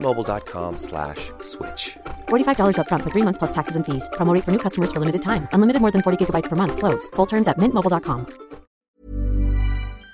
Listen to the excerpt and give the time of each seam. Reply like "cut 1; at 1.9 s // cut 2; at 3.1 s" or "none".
cut 1; at 8.7 s

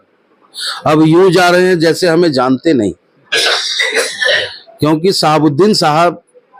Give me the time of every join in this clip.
none

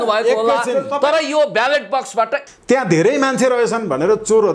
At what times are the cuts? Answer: cut 1; at 2.4 s

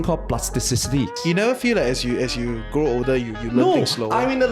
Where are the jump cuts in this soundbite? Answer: cut 1; at 1.2 s

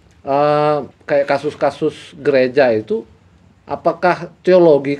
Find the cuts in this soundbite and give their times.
cut 1; at 0.9 s

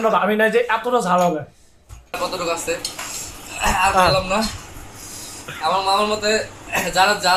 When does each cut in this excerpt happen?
cut 1; at 2.1 s

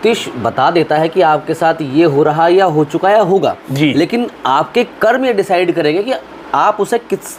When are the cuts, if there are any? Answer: none

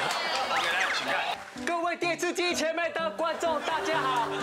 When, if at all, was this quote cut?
cut 1; at 1.3 s

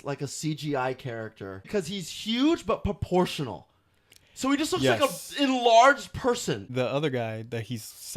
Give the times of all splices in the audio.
cut 1; at 1.6 s // cut 2; at 6.6 s

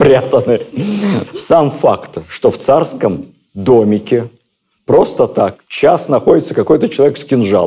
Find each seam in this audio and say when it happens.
none

